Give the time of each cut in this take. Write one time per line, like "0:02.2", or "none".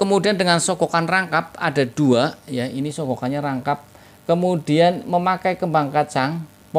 none